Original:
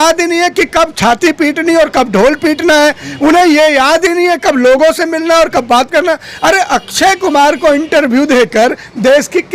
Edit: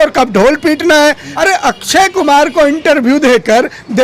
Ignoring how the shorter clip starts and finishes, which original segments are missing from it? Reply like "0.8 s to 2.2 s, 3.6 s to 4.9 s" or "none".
3.1 s to 6.3 s